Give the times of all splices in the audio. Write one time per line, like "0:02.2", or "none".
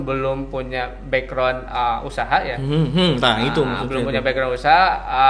none